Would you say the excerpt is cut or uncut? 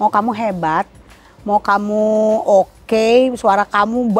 uncut